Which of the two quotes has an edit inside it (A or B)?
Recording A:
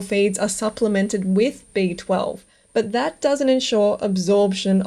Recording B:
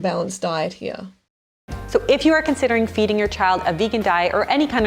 B